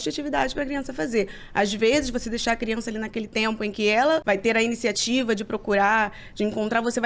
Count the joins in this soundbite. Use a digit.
1